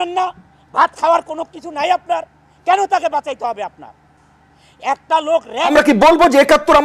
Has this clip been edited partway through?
yes; 1 cut; at 5.7 s

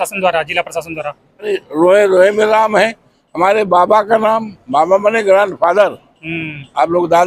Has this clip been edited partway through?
yes; 1 cut; at 1.6 s

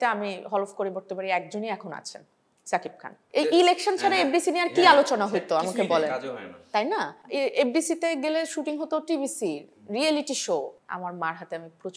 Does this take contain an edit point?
yes; 2 cuts; at 3.2 s, 10.7 s

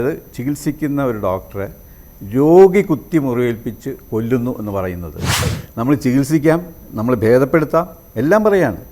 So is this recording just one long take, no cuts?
no; 1 cut; at 5.6 s

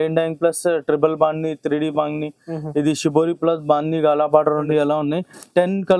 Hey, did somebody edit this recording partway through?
yes; 1 cut; at 4.6 s

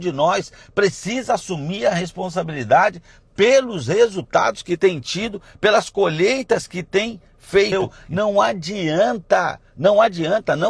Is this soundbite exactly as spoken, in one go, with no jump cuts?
no; 1 cut; at 7.7 s

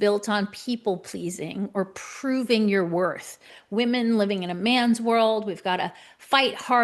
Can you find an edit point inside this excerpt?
yes; 1 cut; at 3.6 s

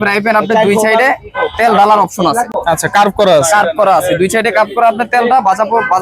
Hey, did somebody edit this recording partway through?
no; 0 cuts

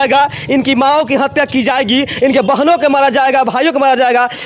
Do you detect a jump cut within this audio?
no; 0 cuts

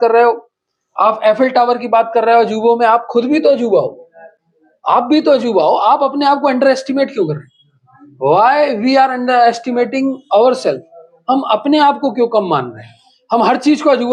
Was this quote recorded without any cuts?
yes; 0 cuts

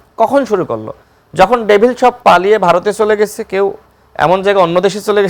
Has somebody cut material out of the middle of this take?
no; 0 cuts

